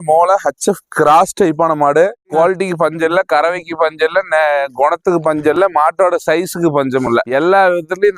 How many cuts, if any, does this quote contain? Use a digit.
1